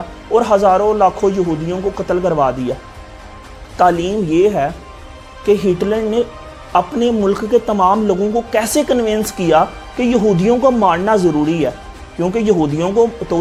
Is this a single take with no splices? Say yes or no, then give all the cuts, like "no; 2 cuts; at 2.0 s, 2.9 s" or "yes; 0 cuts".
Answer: yes; 0 cuts